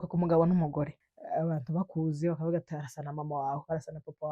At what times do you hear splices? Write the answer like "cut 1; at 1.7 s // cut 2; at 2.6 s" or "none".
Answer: cut 1; at 1.1 s